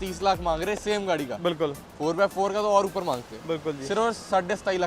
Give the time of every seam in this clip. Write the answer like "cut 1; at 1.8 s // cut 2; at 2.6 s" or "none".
none